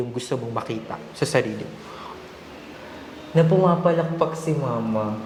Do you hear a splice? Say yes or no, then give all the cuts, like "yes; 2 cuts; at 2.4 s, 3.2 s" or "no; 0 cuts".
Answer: no; 0 cuts